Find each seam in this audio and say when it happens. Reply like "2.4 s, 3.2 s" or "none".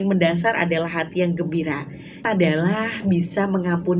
2.2 s